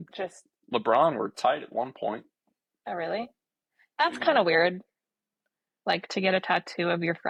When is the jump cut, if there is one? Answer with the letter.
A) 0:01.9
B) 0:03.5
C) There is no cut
C